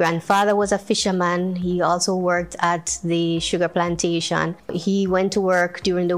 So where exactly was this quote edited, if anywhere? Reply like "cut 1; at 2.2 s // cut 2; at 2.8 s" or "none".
cut 1; at 4.8 s